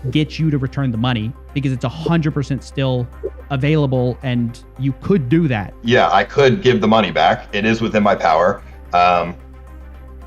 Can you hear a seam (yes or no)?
yes